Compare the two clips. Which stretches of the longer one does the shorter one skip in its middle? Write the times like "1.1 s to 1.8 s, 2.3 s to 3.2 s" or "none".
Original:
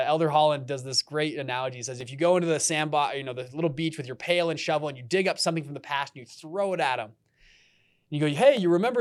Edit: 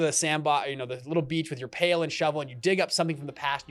none

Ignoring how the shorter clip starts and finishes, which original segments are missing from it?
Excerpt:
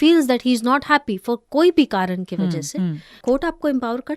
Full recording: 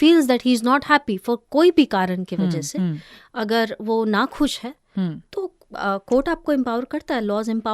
3.2 s to 6.0 s

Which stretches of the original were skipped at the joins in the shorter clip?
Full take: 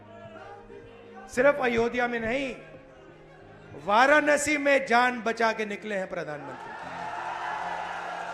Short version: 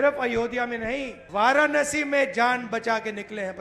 2.6 s to 3.7 s

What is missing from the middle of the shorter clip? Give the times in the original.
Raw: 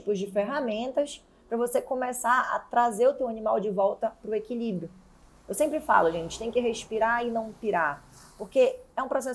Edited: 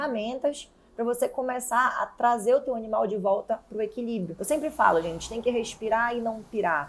4.9 s to 5.4 s

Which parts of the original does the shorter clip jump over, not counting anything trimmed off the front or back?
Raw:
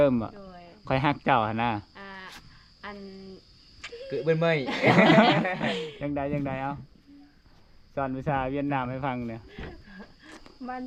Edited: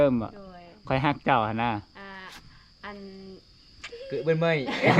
none

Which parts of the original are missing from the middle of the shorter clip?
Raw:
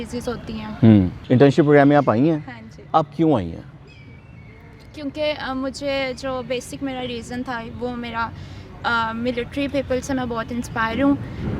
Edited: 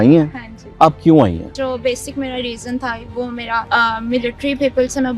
3.7 s to 6.2 s, 8.3 s to 8.8 s

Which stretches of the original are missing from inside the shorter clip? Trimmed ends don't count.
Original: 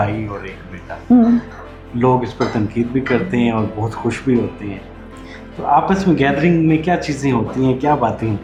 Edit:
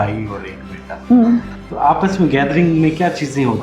1.6 s to 5.5 s

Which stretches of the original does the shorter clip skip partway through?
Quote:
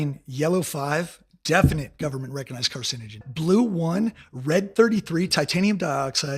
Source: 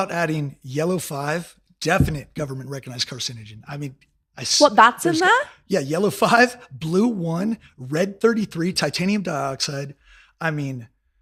3.6 s to 6.7 s

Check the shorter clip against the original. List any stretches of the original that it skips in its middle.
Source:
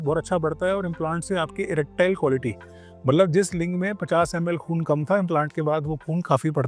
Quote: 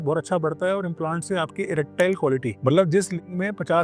2.5 s to 2.9 s

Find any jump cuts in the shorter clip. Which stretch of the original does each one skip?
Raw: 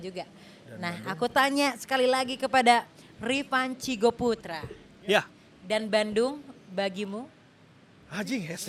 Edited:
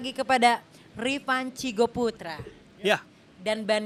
none

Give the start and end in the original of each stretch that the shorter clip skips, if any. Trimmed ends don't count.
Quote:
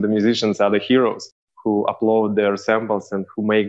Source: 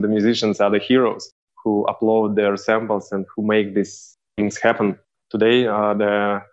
none

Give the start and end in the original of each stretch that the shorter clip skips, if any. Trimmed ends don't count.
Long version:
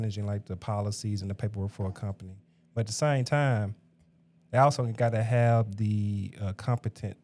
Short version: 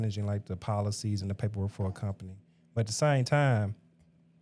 none

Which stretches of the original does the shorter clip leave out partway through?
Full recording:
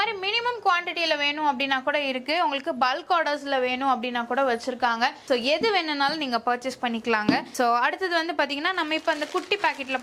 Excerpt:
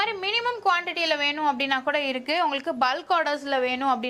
none

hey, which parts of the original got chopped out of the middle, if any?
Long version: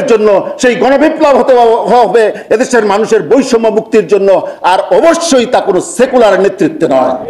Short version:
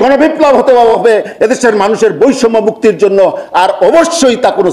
1.8 s to 2.1 s

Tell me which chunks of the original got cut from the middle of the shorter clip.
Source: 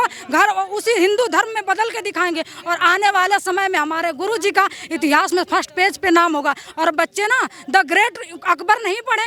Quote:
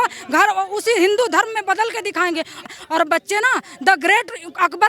2.7 s to 6.6 s

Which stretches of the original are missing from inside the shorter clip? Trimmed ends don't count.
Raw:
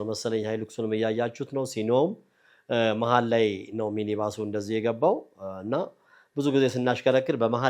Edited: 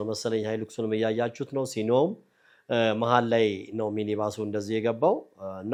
none

